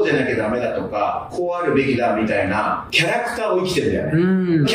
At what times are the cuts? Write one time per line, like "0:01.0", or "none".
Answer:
none